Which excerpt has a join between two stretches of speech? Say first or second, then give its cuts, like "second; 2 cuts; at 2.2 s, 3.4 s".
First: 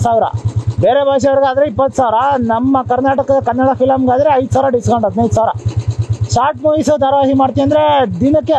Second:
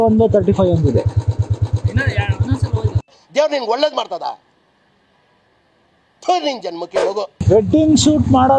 second; 1 cut; at 7.3 s